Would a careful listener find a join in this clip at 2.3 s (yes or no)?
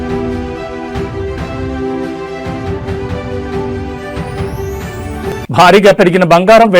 no